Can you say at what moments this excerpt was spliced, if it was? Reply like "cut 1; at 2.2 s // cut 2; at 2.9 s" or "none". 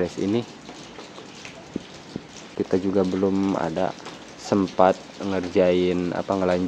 cut 1; at 2.5 s